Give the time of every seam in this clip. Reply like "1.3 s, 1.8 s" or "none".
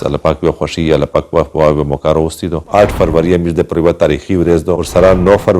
2.6 s